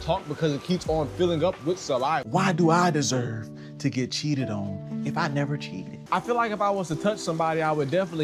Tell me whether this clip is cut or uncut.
cut